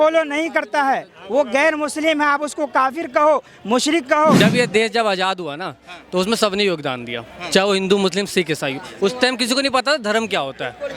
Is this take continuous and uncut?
no; 1 cut; at 4.4 s

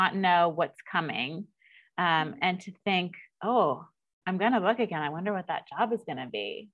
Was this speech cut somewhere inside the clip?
no; 0 cuts

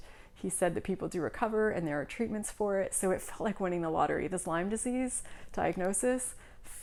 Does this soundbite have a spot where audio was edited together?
no; 0 cuts

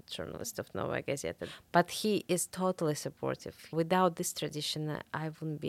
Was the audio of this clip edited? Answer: yes; 2 cuts; at 1.4 s, 3.7 s

